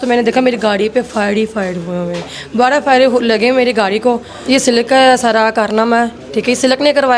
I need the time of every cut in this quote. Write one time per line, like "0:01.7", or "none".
0:04.4